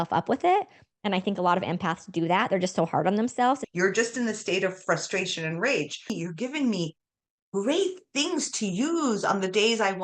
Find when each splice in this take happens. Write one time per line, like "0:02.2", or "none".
0:03.6
0:06.1